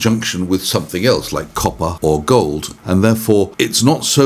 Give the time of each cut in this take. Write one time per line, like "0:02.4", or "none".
0:01.9
0:02.7
0:03.5